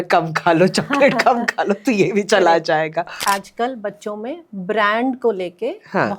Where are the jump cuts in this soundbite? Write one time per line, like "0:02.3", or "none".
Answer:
0:03.2